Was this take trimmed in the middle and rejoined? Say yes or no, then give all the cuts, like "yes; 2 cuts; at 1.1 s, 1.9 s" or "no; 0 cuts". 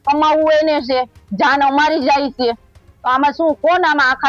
no; 0 cuts